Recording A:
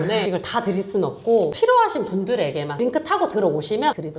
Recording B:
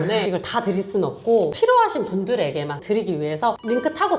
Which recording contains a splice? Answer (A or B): A